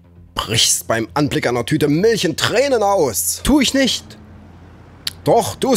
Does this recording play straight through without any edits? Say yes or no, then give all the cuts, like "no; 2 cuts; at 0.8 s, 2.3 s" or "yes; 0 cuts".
yes; 0 cuts